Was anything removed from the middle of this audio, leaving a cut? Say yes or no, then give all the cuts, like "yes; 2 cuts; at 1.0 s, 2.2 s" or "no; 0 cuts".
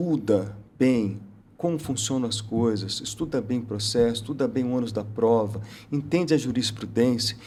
no; 0 cuts